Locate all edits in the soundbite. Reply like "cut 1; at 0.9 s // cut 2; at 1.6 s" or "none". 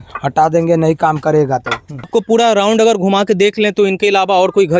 cut 1; at 2.1 s